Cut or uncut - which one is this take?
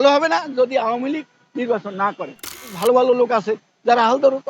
cut